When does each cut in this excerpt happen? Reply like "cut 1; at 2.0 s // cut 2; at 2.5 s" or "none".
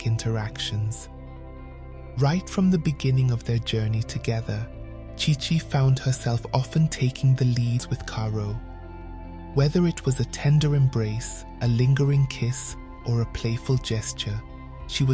cut 1; at 7.8 s